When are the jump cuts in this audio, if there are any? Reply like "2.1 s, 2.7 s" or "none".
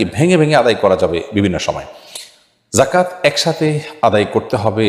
none